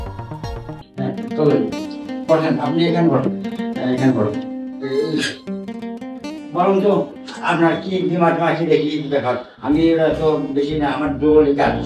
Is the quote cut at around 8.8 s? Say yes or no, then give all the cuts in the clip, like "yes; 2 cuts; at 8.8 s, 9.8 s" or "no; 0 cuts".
no; 1 cut; at 1.2 s